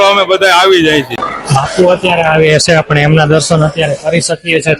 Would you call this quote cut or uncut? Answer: cut